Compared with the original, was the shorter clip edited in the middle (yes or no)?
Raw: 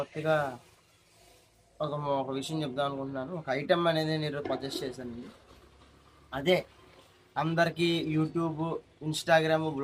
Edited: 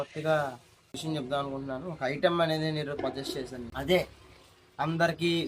yes